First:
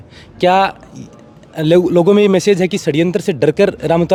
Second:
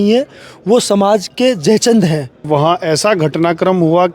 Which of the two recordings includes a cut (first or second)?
second